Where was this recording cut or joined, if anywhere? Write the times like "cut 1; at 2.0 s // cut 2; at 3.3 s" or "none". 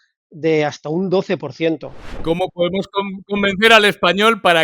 cut 1; at 2.2 s

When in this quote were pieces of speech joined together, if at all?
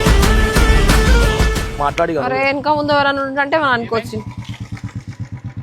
cut 1; at 1.8 s

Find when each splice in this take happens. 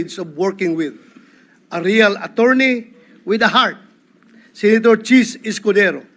none

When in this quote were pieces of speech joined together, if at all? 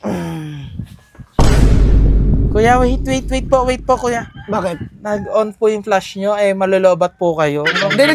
none

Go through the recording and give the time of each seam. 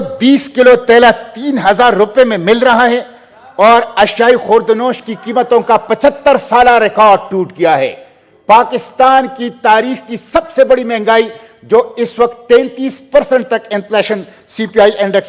none

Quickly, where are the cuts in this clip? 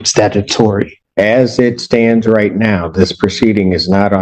cut 1; at 1.0 s

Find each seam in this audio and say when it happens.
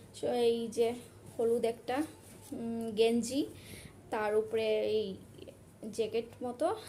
none

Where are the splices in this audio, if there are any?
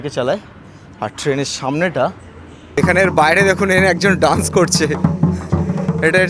cut 1; at 2.8 s

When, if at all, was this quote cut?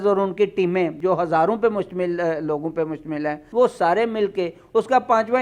cut 1; at 0.9 s // cut 2; at 3.4 s

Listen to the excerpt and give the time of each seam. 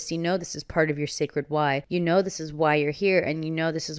cut 1; at 1.8 s

